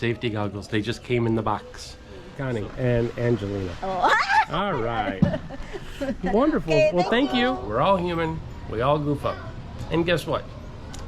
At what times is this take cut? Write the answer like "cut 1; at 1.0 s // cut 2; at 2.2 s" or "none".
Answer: cut 1; at 2.3 s // cut 2; at 7.6 s